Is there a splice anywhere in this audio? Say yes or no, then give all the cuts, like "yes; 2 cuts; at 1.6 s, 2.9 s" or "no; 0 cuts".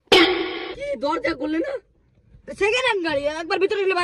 no; 0 cuts